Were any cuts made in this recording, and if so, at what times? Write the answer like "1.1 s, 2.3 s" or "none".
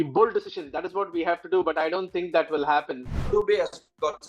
3.3 s